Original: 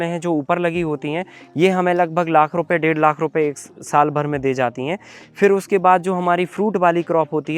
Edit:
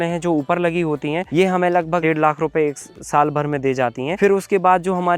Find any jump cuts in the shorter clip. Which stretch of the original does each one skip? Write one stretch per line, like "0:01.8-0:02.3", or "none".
0:01.3-0:01.5
0:02.3-0:02.8
0:04.9-0:05.3